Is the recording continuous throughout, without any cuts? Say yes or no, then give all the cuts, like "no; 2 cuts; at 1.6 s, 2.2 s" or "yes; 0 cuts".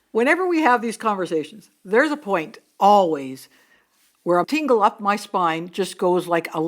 no; 1 cut; at 4.4 s